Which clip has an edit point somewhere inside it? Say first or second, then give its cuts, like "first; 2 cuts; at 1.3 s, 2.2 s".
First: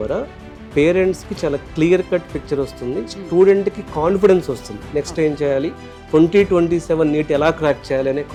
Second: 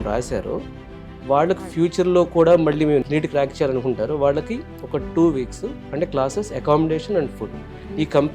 second; 1 cut; at 5.8 s